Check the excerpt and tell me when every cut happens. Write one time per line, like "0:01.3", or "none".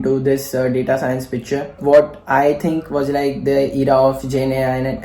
0:01.8